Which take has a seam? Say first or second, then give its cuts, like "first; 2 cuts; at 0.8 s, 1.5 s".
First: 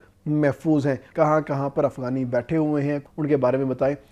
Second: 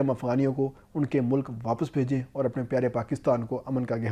first; 2 cuts; at 1.1 s, 3.0 s